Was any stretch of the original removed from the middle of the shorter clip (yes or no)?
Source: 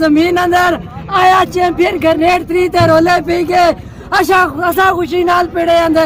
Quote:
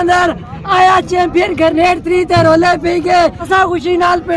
yes